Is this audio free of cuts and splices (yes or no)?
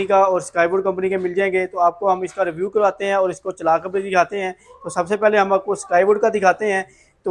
yes